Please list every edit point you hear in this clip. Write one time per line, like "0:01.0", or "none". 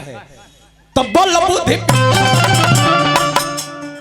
none